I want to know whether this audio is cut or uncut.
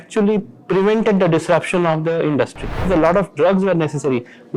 cut